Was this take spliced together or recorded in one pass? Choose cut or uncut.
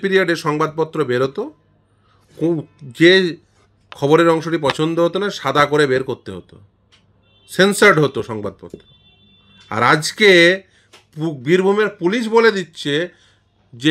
uncut